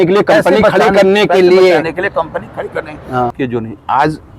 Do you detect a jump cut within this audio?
yes; 1 cut; at 3.3 s

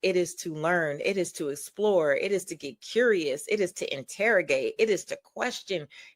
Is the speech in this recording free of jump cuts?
yes; 0 cuts

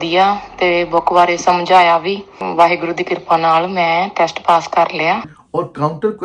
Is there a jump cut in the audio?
yes; 2 cuts; at 2.4 s, 5.3 s

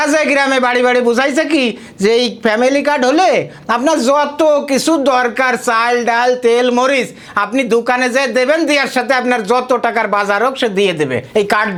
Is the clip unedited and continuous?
yes; 0 cuts

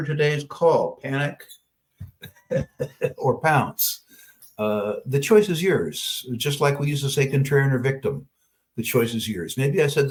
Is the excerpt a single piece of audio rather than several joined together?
yes; 0 cuts

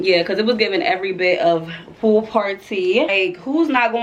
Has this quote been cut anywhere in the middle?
yes; 1 cut; at 3.1 s

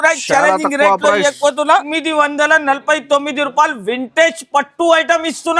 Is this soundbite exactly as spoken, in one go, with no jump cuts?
no; 1 cut; at 1.9 s

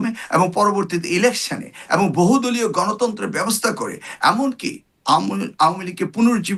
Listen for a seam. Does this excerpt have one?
no; 0 cuts

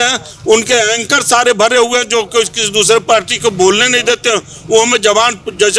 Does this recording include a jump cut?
no; 0 cuts

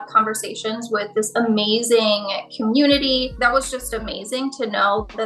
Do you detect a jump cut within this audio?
yes; 1 cut; at 3.4 s

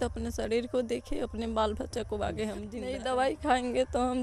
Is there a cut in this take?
yes; 1 cut; at 2.8 s

